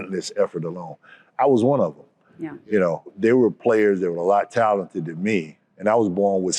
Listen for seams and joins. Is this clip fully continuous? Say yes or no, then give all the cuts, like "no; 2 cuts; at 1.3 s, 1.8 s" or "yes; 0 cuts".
no; 2 cuts; at 3.1 s, 5.6 s